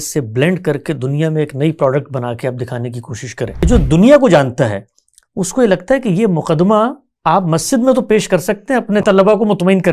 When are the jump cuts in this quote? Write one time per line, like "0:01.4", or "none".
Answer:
0:03.6
0:09.0